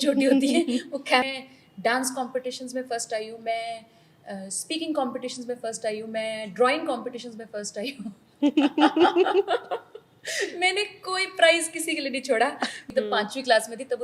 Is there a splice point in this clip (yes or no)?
yes